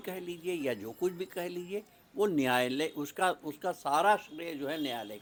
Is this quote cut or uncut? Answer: uncut